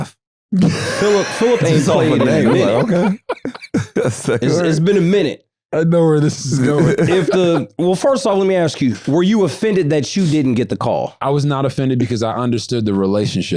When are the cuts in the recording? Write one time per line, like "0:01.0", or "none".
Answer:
0:11.1